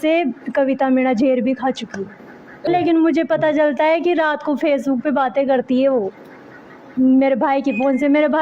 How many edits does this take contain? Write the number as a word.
one